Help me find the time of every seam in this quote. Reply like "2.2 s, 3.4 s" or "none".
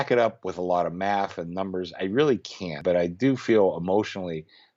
2.8 s